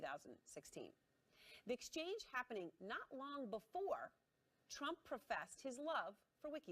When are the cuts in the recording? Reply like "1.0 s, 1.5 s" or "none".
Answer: 4.8 s